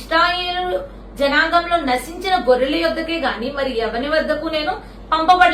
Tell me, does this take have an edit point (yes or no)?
no